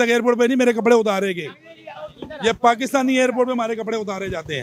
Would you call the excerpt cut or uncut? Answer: uncut